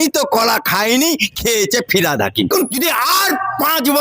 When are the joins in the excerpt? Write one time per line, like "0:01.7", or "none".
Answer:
0:02.7